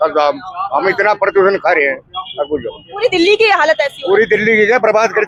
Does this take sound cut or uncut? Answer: uncut